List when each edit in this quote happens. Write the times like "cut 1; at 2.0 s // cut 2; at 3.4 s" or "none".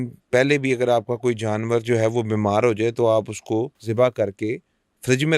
cut 1; at 3.8 s